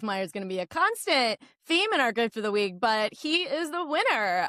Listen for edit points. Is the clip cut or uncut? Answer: uncut